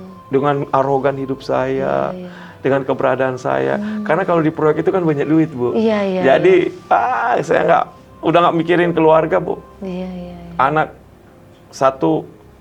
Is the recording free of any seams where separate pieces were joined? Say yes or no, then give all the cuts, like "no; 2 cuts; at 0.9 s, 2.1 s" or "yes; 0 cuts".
yes; 0 cuts